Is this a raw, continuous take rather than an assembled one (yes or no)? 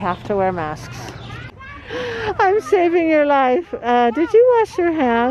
no